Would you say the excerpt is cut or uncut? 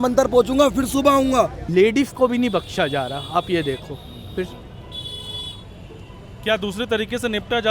cut